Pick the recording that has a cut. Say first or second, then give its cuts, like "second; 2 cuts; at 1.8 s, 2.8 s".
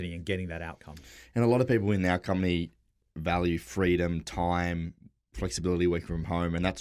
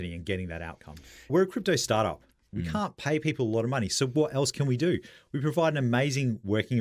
second; 2 cuts; at 1.3 s, 2.5 s